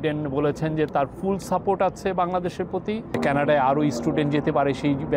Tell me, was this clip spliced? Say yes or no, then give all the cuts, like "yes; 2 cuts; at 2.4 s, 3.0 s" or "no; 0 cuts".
yes; 1 cut; at 3.2 s